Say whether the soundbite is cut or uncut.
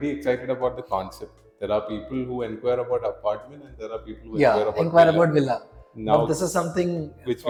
uncut